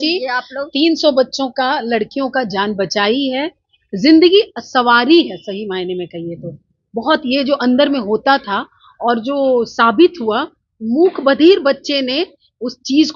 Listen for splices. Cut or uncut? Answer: uncut